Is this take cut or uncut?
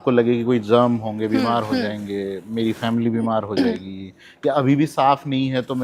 uncut